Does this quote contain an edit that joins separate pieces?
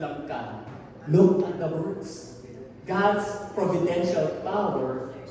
no; 0 cuts

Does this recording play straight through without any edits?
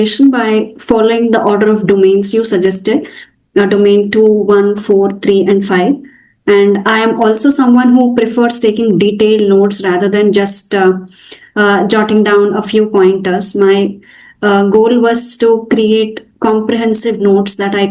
yes; 0 cuts

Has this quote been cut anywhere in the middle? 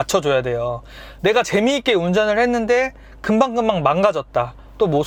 no; 0 cuts

